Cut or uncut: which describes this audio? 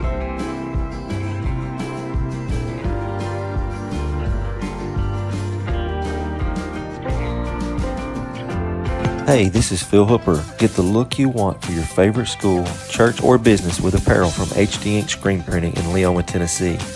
cut